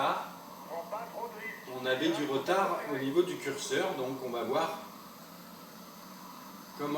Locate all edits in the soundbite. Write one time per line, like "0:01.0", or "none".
0:04.9